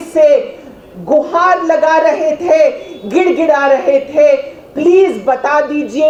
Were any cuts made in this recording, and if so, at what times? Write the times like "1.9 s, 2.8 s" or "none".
none